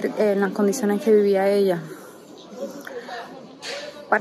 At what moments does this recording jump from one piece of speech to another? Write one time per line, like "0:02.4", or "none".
none